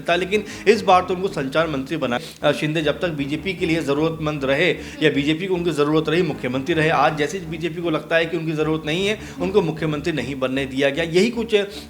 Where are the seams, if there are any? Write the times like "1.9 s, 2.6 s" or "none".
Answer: 2.2 s